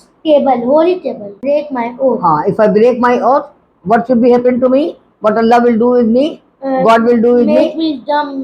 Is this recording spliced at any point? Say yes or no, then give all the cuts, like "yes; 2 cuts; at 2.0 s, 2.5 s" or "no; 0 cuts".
yes; 1 cut; at 1.4 s